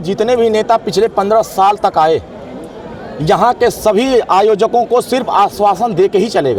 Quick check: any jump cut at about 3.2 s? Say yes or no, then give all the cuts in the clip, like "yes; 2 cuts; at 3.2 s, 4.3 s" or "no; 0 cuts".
no; 0 cuts